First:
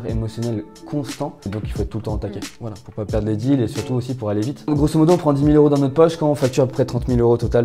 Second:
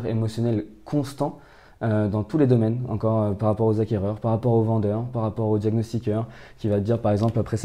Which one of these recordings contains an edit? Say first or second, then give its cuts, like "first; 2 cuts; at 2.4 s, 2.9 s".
first; 2 cuts; at 1.5 s, 4.7 s